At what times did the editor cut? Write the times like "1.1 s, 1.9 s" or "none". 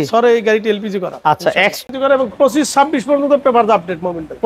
1.8 s